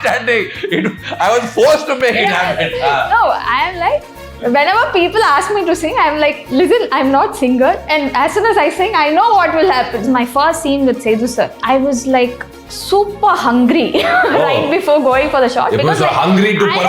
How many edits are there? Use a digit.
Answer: 3